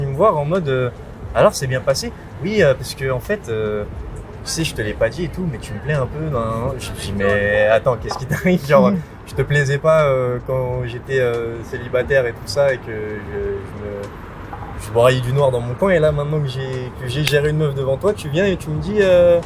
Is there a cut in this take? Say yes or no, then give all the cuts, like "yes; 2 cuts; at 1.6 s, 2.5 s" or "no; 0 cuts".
no; 0 cuts